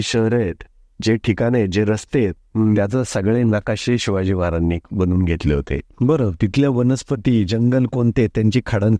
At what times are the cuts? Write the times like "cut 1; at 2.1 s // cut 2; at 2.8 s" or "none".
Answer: none